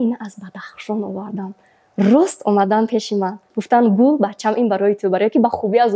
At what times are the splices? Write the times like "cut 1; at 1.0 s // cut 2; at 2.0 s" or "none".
none